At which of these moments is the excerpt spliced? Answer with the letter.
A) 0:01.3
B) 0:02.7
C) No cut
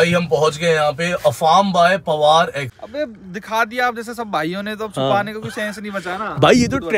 B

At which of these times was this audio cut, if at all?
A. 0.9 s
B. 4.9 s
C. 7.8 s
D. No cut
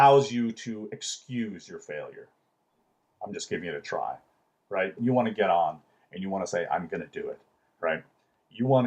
B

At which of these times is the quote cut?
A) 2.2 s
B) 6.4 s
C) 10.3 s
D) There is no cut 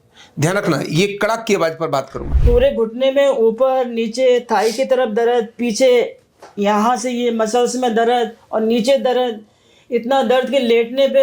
A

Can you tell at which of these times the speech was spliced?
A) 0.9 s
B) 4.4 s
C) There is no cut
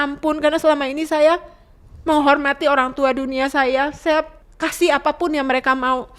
B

